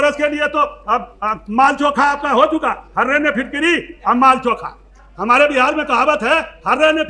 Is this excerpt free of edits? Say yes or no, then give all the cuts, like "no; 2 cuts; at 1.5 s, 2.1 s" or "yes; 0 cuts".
yes; 0 cuts